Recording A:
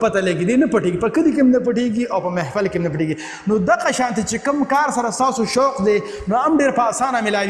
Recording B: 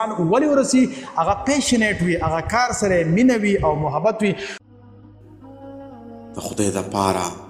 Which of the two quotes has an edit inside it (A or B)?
B